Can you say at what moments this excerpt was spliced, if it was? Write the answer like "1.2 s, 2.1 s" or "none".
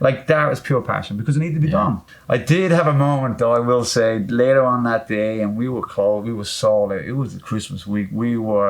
2.1 s